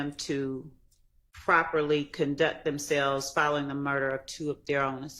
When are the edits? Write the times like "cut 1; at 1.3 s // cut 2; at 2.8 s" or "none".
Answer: none